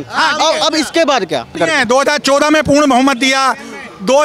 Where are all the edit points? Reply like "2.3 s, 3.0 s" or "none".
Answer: 1.6 s